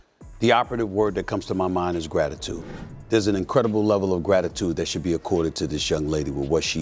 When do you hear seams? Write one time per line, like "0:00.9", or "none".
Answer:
none